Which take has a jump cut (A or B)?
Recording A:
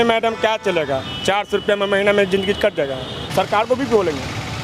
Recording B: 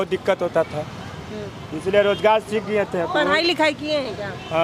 A